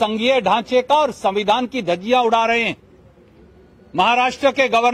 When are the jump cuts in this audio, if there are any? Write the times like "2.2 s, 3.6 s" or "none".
none